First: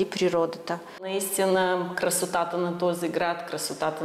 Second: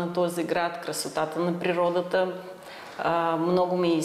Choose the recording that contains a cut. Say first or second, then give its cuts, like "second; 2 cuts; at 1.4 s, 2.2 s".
first; 1 cut; at 1.1 s